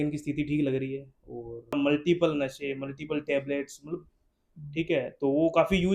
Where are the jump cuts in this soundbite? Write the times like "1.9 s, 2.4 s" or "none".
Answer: 1.8 s